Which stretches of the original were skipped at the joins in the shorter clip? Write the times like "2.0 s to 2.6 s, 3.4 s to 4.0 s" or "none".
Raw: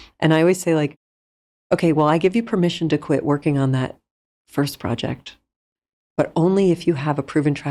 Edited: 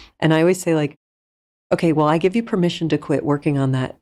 none